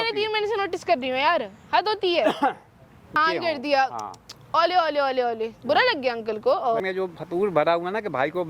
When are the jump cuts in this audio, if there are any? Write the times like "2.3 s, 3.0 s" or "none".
3.2 s, 6.8 s